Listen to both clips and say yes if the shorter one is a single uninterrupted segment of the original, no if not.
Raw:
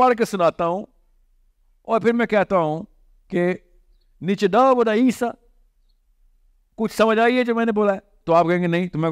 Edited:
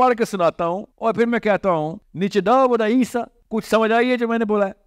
no